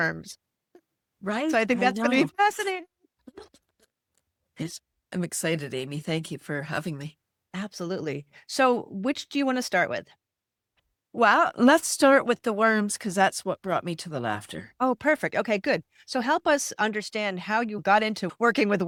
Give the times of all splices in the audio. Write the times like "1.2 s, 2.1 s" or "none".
none